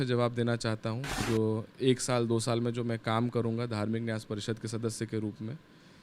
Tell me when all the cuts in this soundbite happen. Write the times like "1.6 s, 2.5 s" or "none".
1.2 s

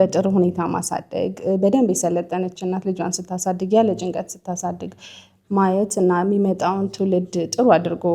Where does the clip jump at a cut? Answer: none

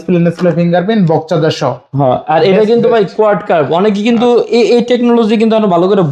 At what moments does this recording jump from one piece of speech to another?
none

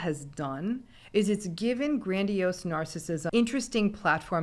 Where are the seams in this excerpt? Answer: 3.2 s

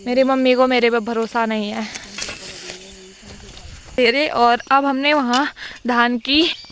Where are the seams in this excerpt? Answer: 3.9 s

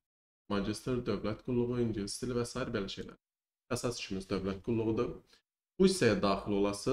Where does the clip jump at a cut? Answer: none

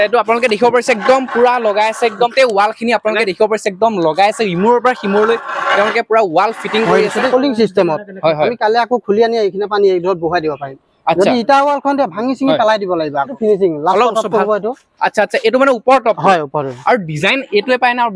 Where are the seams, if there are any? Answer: 2.3 s, 7.3 s, 13.1 s

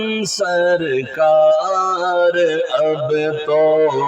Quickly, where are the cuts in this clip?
none

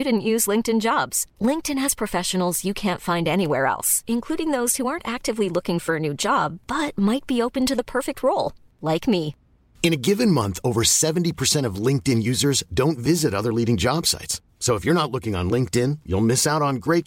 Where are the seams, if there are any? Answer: none

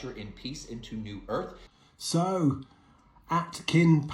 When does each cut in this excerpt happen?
1.6 s

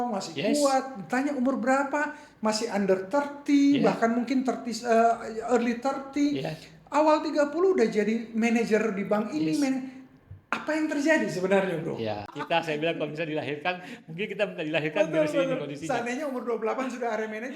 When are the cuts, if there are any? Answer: 12.4 s

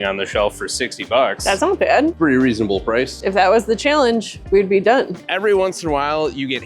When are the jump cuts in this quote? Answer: 2.2 s, 5.3 s

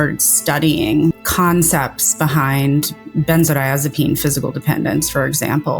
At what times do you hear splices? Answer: 1.2 s

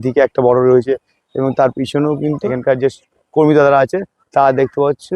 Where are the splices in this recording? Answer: 2.5 s

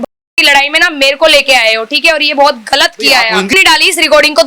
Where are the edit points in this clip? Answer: 3.5 s

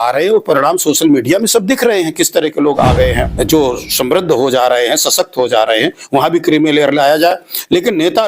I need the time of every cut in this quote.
3.3 s

